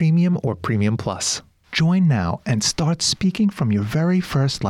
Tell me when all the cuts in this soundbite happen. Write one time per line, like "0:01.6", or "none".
0:01.4